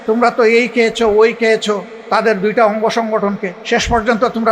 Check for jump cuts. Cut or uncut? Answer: cut